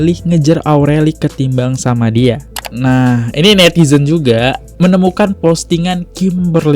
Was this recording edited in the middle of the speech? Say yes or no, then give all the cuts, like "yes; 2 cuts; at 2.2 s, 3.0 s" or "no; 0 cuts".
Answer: yes; 1 cut; at 2.5 s